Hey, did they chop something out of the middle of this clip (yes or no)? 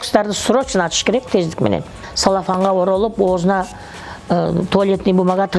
yes